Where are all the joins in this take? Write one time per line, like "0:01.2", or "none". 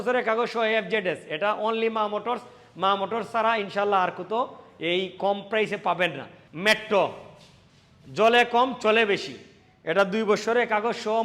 0:06.3